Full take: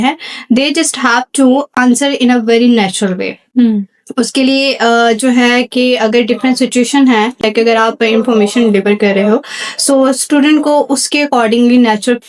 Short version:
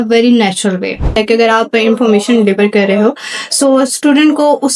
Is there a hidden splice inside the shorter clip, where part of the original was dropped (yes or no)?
yes